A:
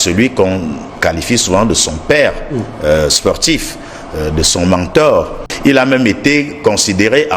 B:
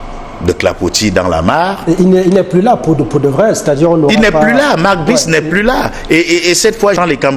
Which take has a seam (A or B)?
A